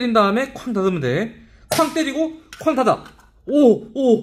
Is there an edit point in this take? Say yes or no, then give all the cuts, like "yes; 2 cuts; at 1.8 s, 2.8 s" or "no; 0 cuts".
no; 0 cuts